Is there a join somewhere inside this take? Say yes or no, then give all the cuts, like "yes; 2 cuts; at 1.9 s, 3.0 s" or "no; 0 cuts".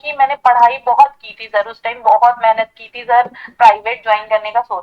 yes; 1 cut; at 3.5 s